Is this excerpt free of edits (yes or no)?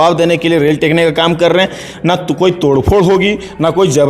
yes